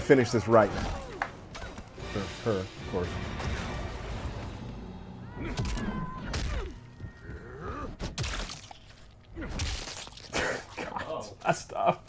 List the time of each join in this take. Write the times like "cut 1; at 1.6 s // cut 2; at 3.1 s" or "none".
cut 1; at 1.9 s